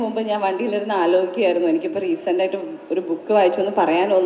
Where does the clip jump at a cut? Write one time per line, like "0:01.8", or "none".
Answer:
none